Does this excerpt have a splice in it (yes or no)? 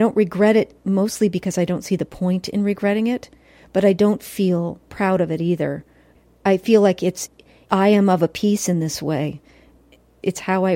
yes